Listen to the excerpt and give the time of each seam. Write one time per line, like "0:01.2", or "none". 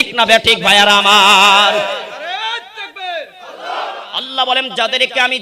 0:04.1